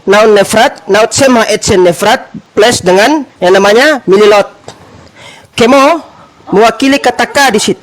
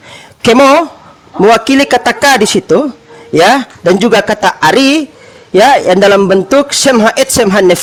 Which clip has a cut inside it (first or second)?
first